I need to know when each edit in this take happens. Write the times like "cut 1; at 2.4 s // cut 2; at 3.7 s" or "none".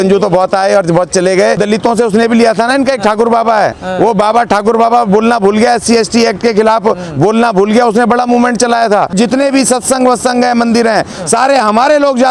cut 1; at 1.6 s // cut 2; at 9.1 s